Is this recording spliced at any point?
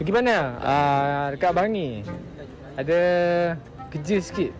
no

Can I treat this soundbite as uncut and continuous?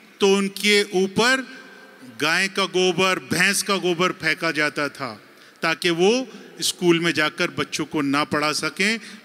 yes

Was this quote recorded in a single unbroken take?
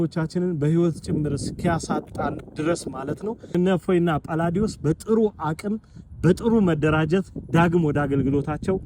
no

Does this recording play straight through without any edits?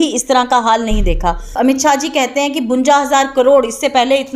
no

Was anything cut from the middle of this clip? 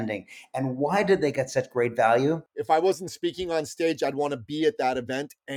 yes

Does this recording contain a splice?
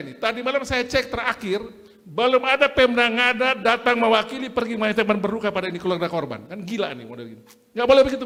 no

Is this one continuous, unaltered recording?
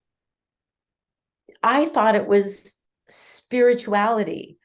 yes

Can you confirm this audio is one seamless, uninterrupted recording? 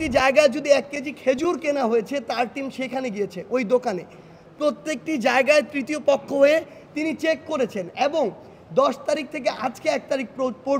yes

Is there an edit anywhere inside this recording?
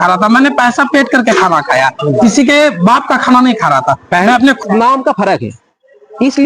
yes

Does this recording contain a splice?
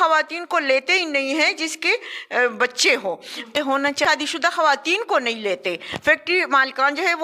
no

